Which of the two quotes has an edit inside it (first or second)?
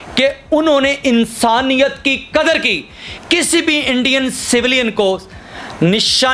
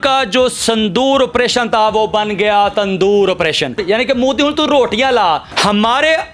second